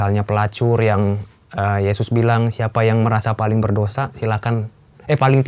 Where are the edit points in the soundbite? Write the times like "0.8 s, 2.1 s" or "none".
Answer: none